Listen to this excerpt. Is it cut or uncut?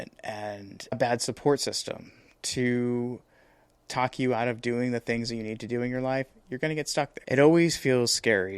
cut